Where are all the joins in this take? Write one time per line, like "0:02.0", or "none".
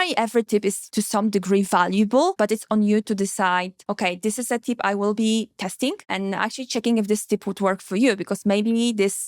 0:00.8
0:02.3
0:03.8
0:06.1